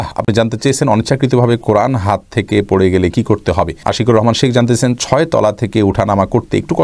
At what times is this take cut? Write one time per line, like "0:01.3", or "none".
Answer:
0:03.8